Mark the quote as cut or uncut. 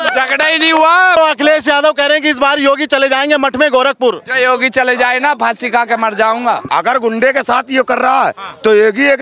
cut